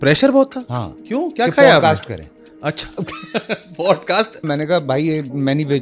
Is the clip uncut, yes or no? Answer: no